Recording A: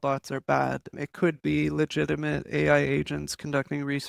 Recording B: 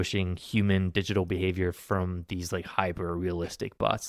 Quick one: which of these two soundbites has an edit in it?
A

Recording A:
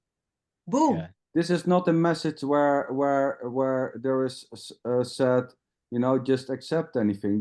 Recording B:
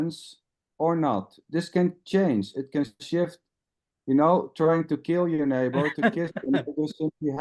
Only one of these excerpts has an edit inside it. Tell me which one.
A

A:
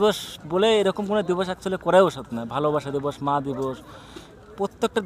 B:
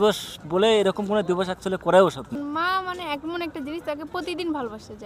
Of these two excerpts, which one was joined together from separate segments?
B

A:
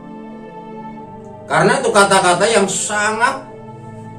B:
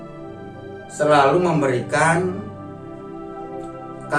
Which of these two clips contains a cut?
A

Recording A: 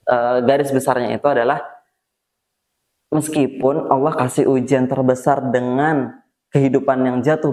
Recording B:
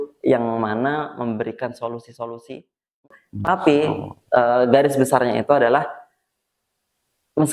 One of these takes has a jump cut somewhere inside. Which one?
B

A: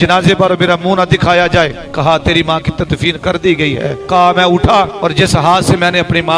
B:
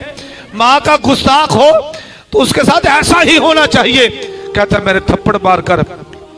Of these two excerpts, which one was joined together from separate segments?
A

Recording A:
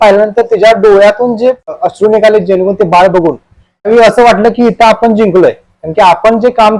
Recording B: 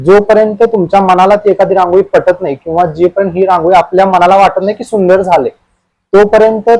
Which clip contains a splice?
A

